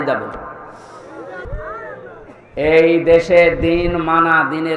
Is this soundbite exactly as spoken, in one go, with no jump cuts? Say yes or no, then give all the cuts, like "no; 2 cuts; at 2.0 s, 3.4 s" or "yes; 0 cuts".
no; 1 cut; at 1.4 s